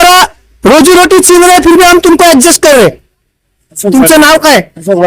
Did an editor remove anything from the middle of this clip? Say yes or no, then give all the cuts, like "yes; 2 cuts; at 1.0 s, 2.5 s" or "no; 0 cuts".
yes; 1 cut; at 3.3 s